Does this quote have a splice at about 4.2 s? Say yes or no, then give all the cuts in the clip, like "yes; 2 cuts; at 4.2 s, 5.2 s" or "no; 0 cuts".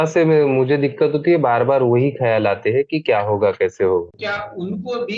yes; 1 cut; at 4.2 s